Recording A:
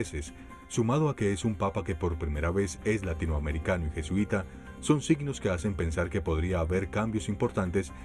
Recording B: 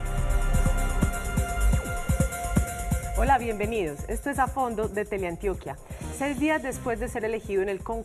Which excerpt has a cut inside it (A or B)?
A